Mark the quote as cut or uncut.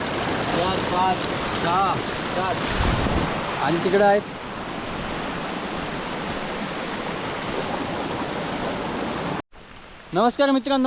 cut